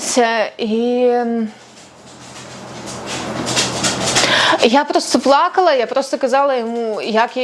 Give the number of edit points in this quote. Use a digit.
0